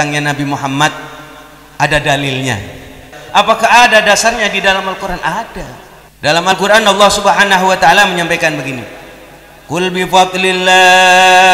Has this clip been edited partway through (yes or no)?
yes